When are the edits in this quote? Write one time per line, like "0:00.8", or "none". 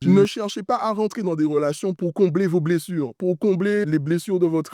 none